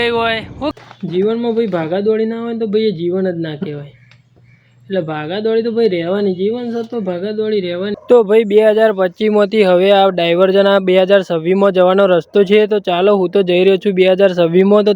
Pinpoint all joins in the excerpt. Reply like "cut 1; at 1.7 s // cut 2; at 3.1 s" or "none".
cut 1; at 0.7 s // cut 2; at 7.9 s